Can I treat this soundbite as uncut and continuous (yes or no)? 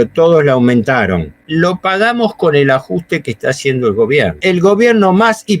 no